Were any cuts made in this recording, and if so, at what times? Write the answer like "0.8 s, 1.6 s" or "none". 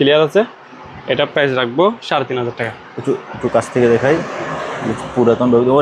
none